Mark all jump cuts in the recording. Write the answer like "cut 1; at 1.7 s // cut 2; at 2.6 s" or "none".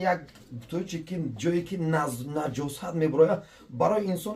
none